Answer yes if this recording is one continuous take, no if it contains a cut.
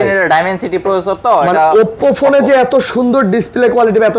yes